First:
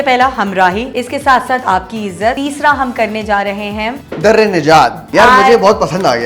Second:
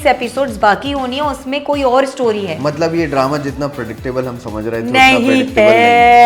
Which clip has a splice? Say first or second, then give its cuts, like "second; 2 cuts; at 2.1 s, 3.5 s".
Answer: first; 4 cuts; at 0.9 s, 2.4 s, 4.0 s, 5.0 s